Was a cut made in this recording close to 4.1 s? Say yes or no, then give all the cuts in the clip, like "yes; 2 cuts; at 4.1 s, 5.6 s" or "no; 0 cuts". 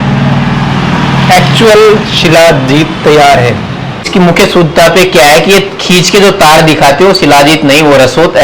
yes; 1 cut; at 4.1 s